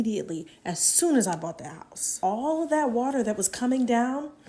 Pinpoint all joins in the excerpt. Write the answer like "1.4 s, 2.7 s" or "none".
2.2 s